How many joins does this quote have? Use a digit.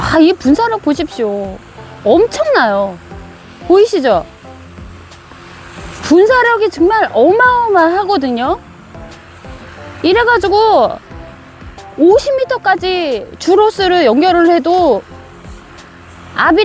0